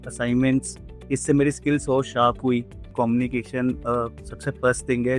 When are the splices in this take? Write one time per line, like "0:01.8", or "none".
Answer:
0:02.9